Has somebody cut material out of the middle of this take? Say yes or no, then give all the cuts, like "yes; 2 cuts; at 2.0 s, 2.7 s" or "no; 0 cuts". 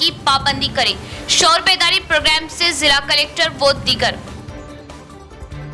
no; 0 cuts